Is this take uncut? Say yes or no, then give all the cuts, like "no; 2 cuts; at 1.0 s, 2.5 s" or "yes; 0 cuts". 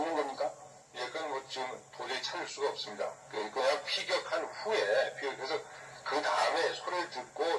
no; 1 cut; at 3.2 s